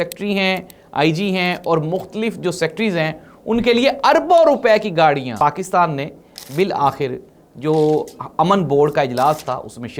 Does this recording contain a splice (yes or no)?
yes